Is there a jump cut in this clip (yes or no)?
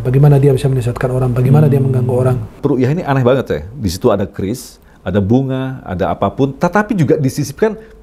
yes